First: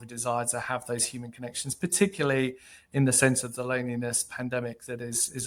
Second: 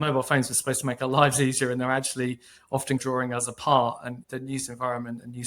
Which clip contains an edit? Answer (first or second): second